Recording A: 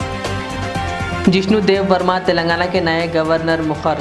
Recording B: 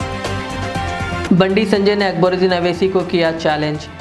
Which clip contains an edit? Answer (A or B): A